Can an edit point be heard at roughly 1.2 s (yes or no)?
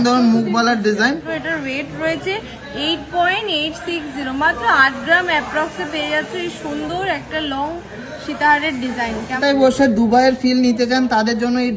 yes